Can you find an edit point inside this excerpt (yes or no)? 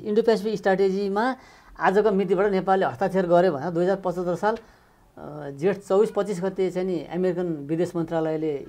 no